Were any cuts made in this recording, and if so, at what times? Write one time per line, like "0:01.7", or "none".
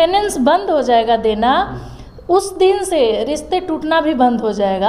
none